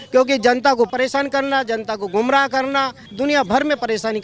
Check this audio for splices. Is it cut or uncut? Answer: cut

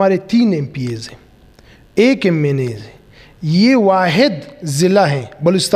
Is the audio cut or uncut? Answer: uncut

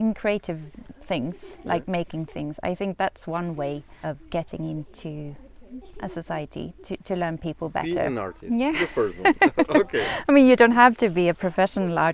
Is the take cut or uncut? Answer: uncut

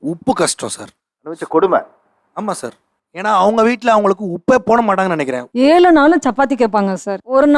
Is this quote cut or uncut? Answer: cut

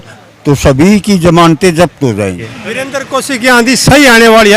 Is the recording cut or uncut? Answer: cut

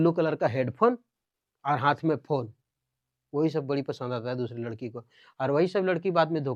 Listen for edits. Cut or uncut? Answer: uncut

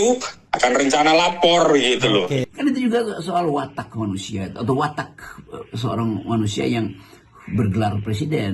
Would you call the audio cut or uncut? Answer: cut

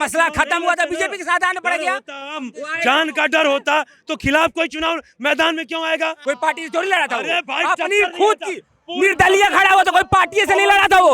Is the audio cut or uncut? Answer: cut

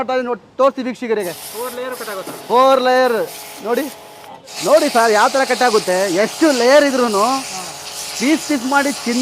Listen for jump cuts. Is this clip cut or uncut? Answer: cut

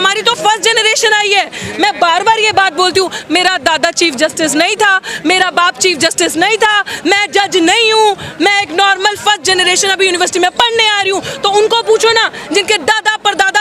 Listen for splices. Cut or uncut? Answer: uncut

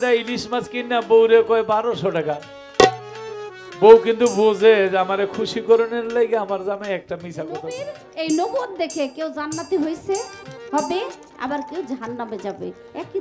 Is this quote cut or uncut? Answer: cut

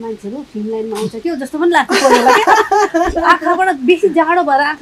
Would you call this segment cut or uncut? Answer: uncut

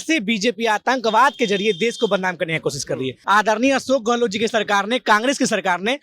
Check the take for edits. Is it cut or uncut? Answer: cut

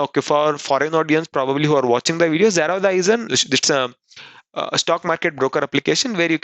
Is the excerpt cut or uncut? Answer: cut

